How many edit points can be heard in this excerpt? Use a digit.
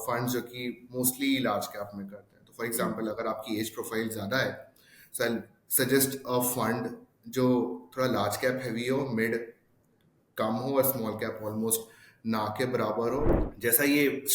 1